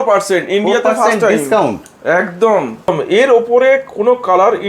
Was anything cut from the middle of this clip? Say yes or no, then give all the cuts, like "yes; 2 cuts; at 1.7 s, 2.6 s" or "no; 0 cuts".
yes; 1 cut; at 2.9 s